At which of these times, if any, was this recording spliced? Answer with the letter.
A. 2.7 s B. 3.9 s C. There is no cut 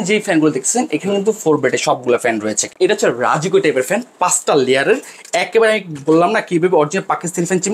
A